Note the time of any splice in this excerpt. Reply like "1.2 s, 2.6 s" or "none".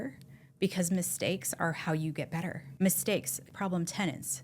2.6 s, 3.5 s